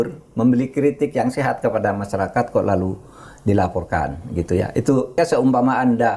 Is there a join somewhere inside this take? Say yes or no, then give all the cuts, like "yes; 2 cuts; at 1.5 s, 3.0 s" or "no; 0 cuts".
yes; 1 cut; at 5.2 s